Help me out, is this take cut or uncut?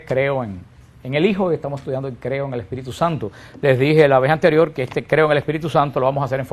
cut